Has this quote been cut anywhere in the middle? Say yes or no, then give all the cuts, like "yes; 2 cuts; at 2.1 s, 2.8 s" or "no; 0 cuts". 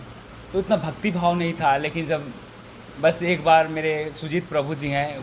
no; 0 cuts